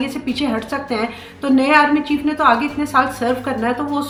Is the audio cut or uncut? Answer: uncut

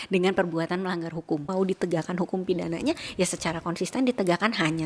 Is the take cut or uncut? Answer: cut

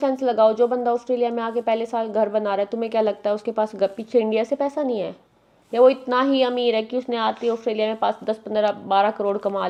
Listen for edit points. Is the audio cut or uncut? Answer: uncut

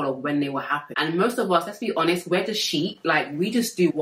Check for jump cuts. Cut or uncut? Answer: cut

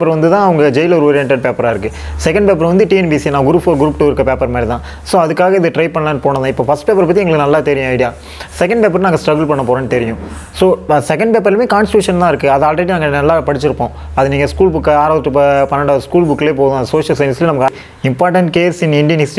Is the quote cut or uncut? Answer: cut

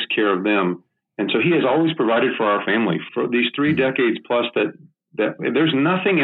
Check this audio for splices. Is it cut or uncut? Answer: cut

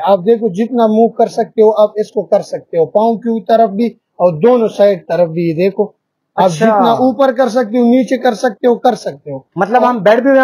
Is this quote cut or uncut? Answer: uncut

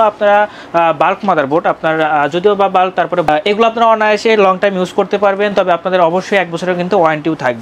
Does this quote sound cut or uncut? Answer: uncut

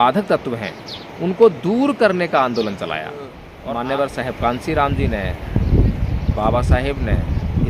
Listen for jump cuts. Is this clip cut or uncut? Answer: cut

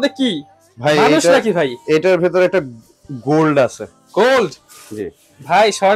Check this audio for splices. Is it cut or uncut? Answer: uncut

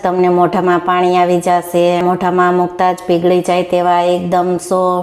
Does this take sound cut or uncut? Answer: cut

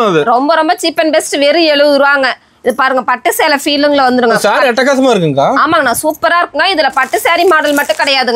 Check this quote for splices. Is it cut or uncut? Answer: uncut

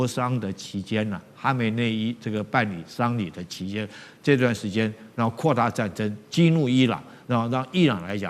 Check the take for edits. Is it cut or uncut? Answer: uncut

